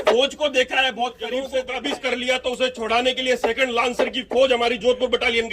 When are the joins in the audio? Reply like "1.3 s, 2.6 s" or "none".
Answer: 1.2 s

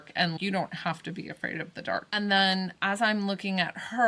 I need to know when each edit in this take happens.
2.1 s

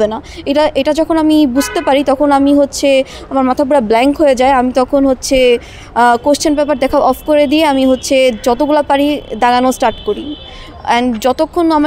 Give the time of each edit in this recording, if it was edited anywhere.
none

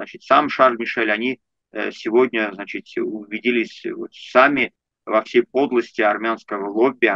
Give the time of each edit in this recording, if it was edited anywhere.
none

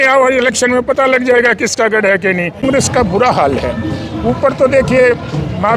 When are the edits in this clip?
2.6 s

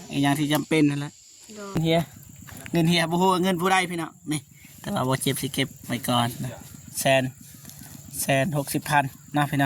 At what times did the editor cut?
1.8 s

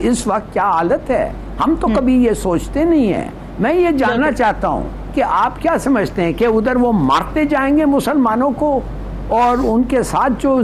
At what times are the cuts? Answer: none

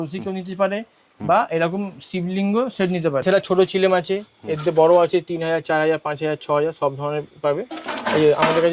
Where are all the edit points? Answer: 3.2 s

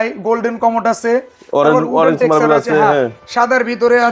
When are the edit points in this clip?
none

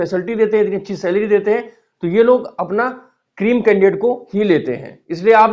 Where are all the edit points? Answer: none

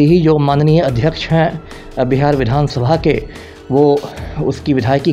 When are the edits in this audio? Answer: none

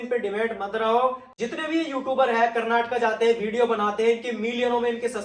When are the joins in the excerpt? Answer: 1.3 s

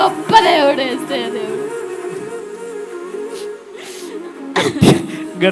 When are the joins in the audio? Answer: none

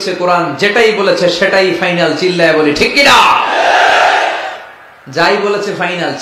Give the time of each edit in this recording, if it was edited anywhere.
none

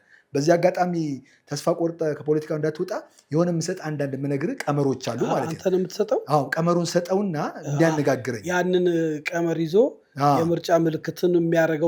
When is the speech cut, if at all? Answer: none

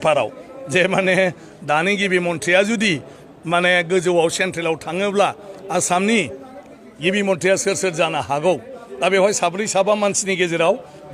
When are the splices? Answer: none

